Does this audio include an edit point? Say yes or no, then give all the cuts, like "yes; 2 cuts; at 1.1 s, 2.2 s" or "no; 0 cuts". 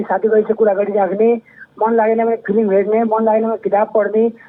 no; 0 cuts